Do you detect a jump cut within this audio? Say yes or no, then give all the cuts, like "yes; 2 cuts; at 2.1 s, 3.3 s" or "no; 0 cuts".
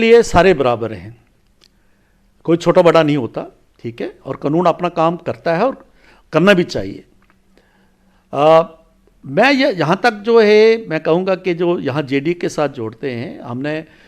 no; 0 cuts